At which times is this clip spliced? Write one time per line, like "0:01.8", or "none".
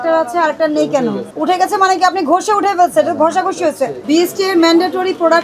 0:01.3
0:04.0